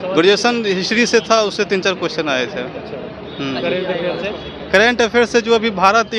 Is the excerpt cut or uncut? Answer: uncut